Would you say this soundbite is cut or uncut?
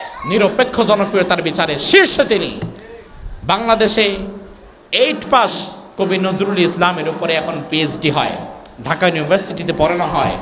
uncut